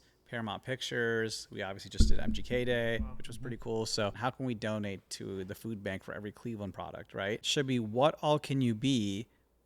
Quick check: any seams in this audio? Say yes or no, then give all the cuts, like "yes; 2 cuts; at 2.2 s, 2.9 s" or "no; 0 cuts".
yes; 2 cuts; at 4.2 s, 7.4 s